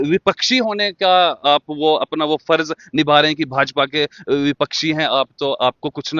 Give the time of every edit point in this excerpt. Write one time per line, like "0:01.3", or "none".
none